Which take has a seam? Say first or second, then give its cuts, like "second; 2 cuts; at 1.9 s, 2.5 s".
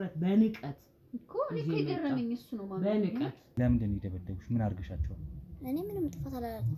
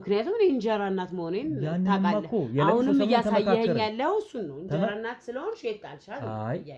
first; 1 cut; at 3.4 s